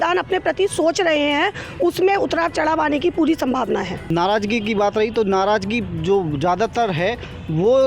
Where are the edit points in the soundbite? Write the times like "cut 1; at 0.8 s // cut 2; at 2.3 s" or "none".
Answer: cut 1; at 4.1 s